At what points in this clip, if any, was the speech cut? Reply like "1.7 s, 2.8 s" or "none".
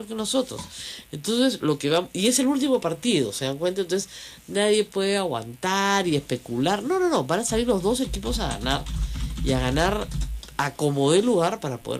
none